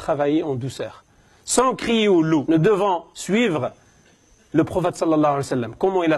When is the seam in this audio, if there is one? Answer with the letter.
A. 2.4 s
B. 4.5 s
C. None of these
A